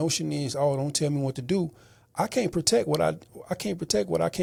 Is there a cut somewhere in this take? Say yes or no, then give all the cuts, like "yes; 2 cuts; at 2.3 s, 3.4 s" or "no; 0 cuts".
no; 0 cuts